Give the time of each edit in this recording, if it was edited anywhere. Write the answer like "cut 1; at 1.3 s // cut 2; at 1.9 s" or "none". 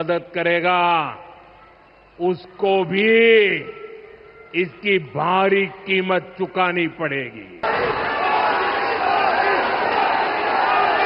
cut 1; at 7.6 s